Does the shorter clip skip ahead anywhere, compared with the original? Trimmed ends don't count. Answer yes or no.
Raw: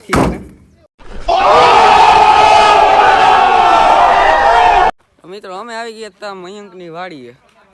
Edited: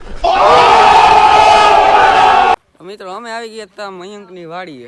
yes